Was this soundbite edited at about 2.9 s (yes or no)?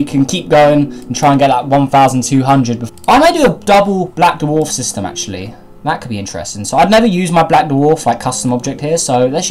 no